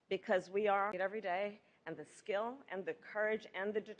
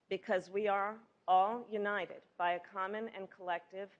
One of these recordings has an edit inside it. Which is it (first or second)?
second